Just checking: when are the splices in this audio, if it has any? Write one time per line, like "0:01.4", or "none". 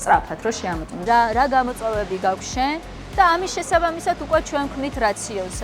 0:01.0